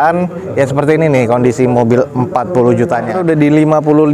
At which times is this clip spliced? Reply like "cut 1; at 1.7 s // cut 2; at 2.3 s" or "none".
cut 1; at 3.2 s